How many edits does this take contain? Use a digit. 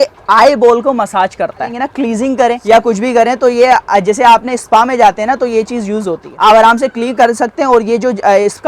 3